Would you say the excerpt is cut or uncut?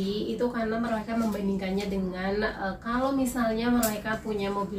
uncut